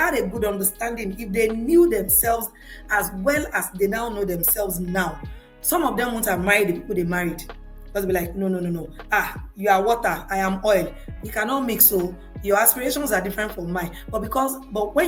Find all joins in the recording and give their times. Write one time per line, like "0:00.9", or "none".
none